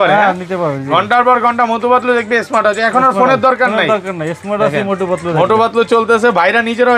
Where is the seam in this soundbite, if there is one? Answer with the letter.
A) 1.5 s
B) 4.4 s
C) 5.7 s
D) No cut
D